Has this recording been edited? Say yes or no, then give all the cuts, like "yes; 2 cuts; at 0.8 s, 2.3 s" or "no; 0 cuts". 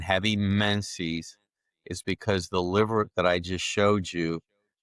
no; 0 cuts